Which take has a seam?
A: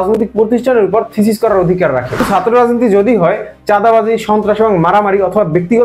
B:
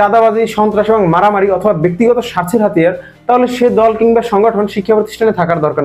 A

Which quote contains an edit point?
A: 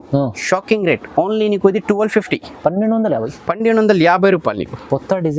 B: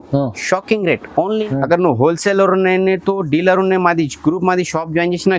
B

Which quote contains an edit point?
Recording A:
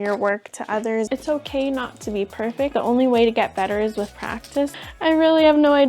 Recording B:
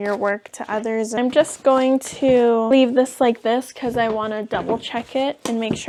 A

